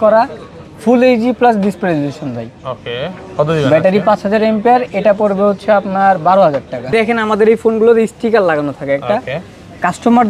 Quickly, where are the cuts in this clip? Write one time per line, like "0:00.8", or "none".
0:06.9